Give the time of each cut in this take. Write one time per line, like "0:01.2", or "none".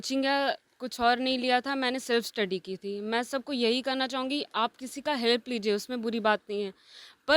none